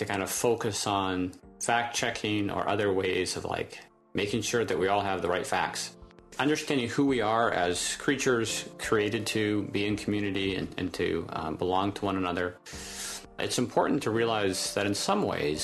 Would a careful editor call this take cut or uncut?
cut